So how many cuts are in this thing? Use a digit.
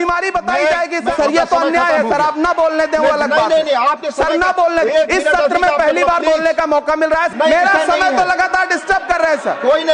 2